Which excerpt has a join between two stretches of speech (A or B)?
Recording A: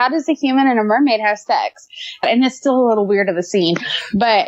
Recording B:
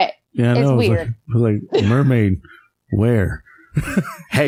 A